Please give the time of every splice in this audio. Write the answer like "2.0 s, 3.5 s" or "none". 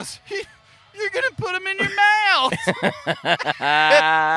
none